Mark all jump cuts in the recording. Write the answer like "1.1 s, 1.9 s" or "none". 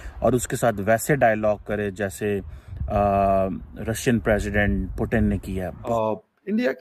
5.9 s